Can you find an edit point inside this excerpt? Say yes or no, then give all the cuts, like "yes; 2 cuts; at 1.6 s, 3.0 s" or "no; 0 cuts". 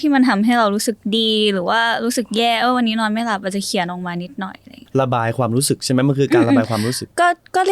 yes; 1 cut; at 4.8 s